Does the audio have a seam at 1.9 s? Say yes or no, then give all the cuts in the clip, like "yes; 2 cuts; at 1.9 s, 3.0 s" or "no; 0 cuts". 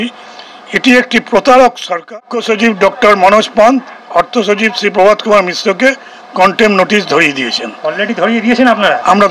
yes; 1 cut; at 1.9 s